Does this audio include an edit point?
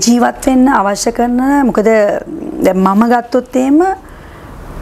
no; 0 cuts

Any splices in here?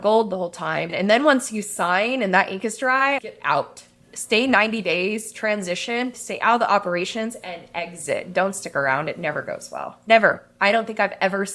yes; 3 cuts; at 0.9 s, 3.2 s, 6.1 s

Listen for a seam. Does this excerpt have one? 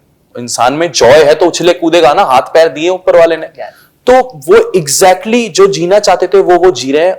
no; 0 cuts

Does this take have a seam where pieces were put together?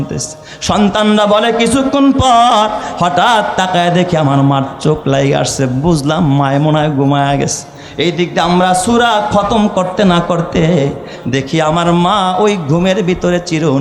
no; 0 cuts

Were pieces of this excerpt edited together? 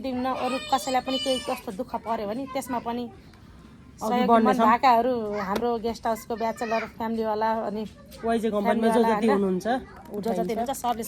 no; 0 cuts

